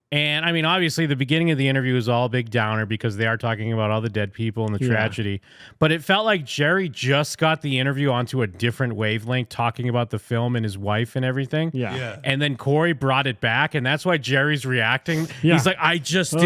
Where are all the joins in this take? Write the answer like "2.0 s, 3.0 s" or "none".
none